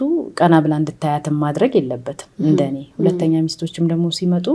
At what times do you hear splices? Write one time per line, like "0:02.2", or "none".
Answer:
none